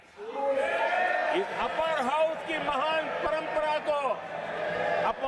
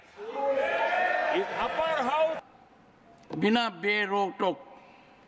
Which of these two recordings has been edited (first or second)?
second